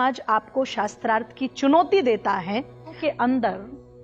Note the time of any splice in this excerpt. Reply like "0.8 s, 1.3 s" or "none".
3.0 s